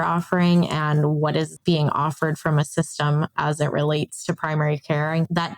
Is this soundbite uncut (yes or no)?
no